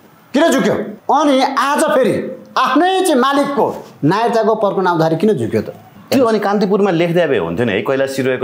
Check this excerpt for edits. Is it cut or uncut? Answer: cut